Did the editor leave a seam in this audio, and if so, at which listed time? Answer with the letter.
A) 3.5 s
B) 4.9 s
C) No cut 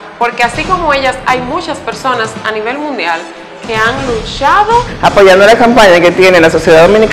B